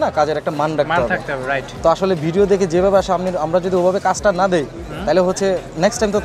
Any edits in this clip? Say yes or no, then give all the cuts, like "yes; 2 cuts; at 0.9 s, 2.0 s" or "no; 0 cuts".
yes; 1 cut; at 1.7 s